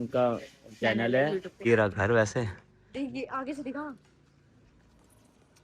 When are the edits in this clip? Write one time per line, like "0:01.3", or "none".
0:01.6